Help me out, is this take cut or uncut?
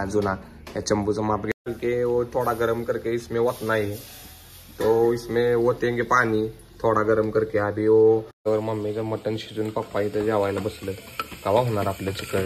cut